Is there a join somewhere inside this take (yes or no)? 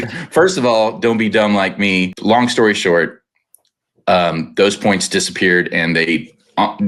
yes